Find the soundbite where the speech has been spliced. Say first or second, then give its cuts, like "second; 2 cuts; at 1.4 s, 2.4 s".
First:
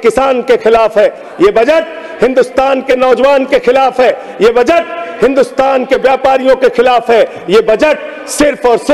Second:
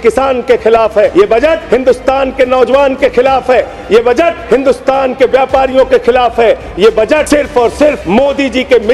second; 4 cuts; at 1.4 s, 4.4 s, 7.3 s, 8.0 s